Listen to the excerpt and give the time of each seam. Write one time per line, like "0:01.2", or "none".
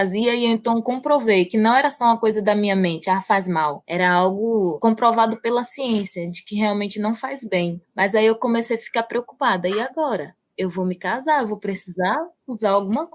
none